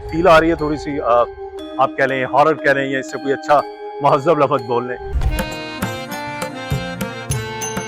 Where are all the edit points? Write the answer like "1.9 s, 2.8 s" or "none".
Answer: 5.1 s